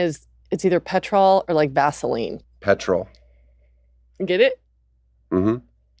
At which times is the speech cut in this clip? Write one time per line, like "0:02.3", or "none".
0:02.5